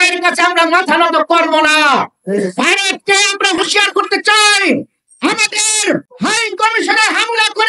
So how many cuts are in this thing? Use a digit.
0